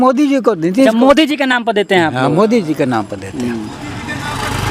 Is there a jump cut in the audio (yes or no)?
no